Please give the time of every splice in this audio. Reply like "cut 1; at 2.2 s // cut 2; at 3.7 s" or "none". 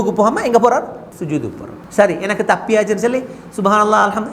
cut 1; at 1.3 s